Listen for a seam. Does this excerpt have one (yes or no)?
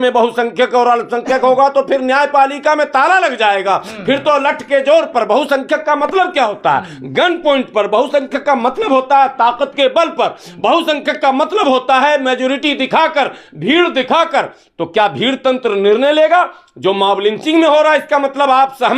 no